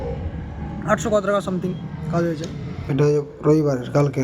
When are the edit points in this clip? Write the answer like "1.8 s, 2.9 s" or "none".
2.8 s